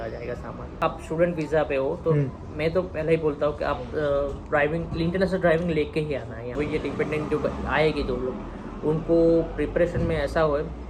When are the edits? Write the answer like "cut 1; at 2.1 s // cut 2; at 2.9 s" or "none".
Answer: cut 1; at 0.8 s // cut 2; at 6.6 s